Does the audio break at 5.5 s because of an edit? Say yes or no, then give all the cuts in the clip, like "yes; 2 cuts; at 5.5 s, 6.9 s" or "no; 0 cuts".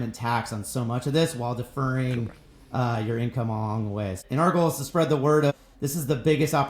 yes; 2 cuts; at 4.2 s, 5.5 s